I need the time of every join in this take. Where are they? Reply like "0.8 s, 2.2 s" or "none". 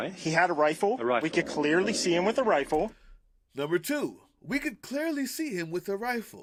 none